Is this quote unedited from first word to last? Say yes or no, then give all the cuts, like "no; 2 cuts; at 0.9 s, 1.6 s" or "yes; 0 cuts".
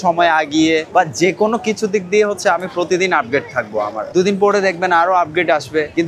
no; 1 cut; at 4.1 s